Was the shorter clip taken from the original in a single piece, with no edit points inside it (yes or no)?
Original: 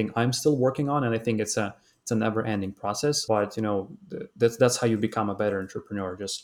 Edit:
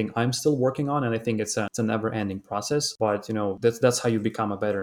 no